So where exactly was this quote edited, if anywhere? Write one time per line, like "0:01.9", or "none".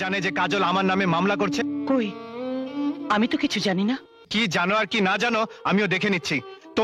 0:01.8
0:04.1